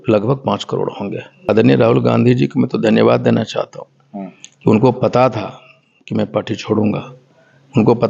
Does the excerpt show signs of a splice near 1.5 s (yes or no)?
yes